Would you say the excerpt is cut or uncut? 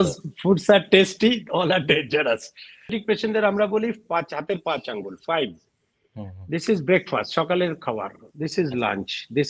cut